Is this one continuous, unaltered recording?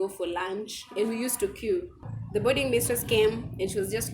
no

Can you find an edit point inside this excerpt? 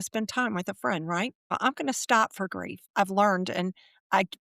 yes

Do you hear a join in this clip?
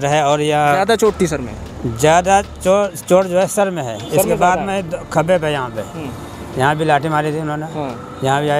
no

